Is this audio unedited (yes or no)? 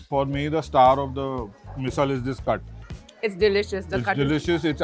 yes